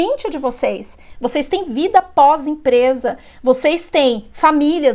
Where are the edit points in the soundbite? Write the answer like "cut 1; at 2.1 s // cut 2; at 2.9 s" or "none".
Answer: none